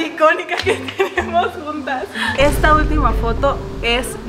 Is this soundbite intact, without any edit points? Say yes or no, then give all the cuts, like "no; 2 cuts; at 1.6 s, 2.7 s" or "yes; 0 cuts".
no; 1 cut; at 2.3 s